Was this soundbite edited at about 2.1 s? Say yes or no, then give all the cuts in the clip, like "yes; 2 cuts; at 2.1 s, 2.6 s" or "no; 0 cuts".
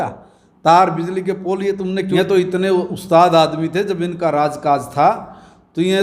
yes; 1 cut; at 2.1 s